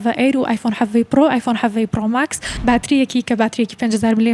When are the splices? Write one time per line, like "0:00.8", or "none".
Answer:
0:02.4